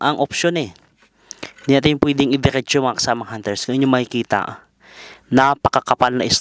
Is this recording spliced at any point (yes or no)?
no